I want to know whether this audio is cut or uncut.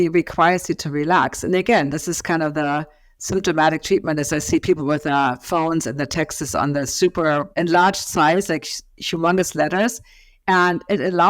cut